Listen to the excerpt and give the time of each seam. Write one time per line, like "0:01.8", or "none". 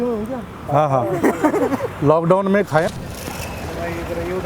0:02.9